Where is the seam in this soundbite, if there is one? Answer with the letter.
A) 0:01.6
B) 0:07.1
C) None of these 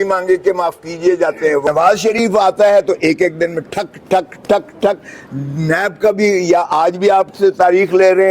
A